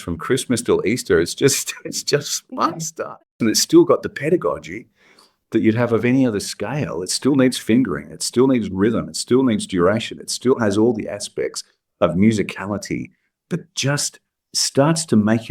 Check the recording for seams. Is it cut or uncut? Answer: cut